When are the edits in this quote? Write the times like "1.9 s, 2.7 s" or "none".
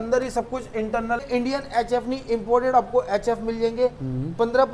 1.2 s